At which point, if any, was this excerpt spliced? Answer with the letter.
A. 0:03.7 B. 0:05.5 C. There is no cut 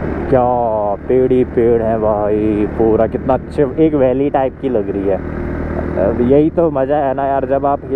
C